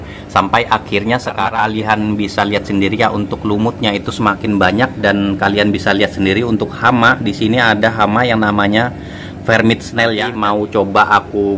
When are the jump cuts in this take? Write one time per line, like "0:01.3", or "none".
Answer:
0:01.5
0:10.3